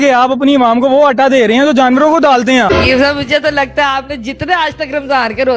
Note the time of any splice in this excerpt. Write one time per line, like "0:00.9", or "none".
0:02.7